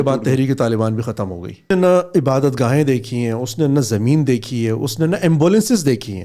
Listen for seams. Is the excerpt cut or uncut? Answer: cut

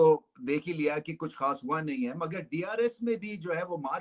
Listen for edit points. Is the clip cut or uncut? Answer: uncut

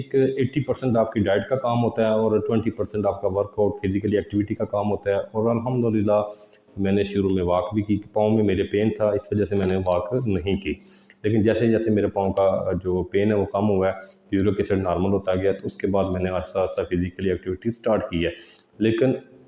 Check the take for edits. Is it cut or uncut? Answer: uncut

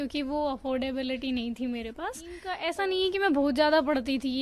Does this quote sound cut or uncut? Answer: cut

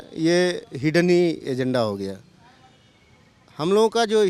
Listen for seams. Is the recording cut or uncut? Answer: uncut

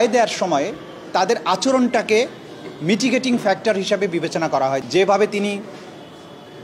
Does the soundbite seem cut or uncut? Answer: cut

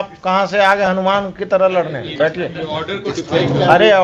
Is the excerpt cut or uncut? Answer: uncut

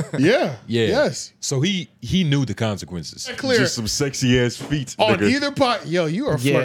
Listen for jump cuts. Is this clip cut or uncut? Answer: cut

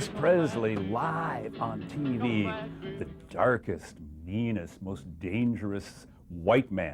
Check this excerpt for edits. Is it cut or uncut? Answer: uncut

